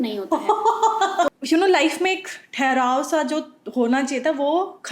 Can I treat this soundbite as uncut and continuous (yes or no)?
no